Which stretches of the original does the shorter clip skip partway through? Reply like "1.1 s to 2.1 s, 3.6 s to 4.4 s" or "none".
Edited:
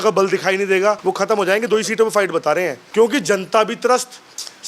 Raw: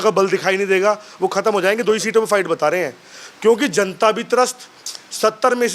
1.0 s to 1.2 s, 3.0 s to 3.3 s